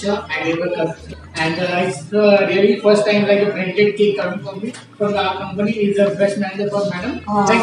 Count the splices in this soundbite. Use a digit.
1